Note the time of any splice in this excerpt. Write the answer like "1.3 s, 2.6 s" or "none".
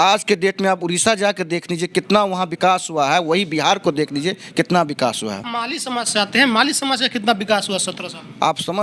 5.5 s